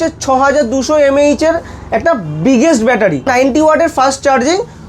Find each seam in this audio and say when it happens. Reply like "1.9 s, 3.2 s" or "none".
3.3 s